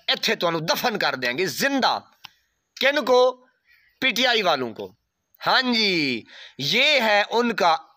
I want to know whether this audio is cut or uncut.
uncut